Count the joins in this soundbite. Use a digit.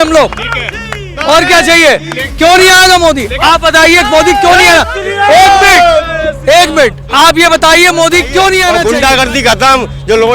1